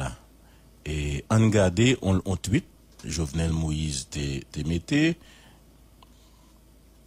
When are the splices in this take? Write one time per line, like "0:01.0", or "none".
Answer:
0:05.7

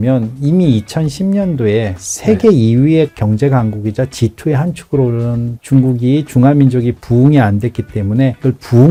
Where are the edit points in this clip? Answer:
none

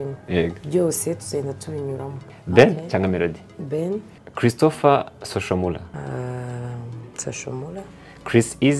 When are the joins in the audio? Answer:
0:02.2
0:04.2
0:05.9

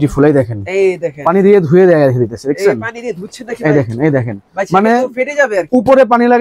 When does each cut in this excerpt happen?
none

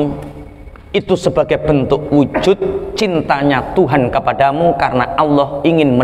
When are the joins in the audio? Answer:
none

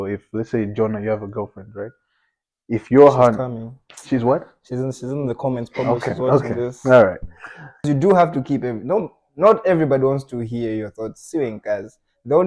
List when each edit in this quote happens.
0:07.9

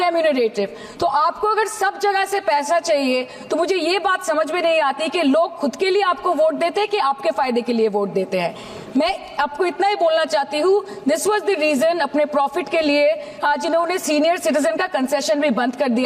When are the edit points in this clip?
none

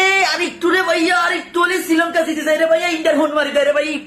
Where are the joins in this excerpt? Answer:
none

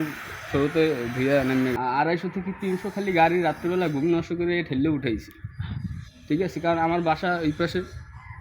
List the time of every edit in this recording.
0:01.7

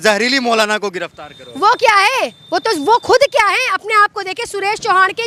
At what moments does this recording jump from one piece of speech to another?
none

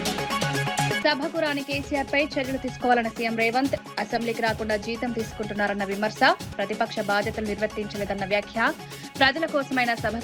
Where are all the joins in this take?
0:01.0

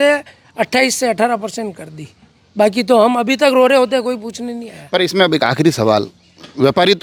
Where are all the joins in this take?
none

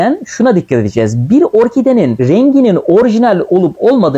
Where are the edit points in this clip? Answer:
none

